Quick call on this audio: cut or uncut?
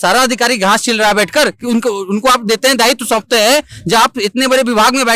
uncut